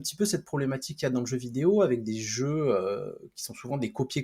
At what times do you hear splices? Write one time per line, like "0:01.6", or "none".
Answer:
none